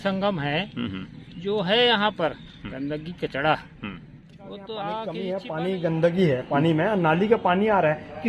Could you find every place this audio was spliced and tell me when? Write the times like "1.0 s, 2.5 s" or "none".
5.2 s